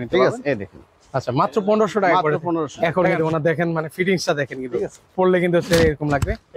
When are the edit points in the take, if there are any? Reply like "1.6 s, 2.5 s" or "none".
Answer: 2.8 s